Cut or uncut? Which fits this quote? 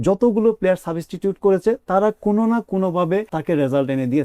cut